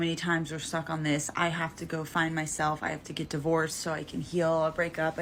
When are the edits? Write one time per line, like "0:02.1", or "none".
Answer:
none